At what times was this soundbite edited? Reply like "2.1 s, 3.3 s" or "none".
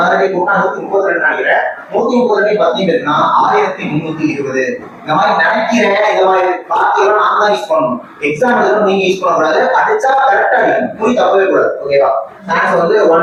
none